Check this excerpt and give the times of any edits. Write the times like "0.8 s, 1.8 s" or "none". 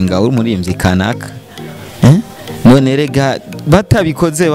none